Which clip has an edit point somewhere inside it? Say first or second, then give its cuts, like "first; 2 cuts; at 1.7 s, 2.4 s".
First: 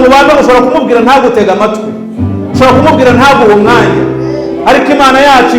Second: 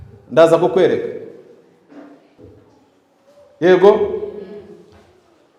second; 1 cut; at 2.4 s